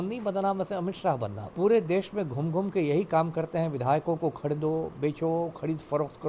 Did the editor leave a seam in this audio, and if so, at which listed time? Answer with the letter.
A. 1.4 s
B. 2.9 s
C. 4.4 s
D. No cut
A